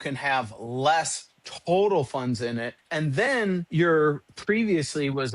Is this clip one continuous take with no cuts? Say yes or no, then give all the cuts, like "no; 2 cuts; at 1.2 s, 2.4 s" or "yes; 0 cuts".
no; 3 cuts; at 2.8 s, 3.7 s, 4.3 s